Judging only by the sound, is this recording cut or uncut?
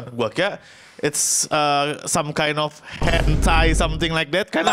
uncut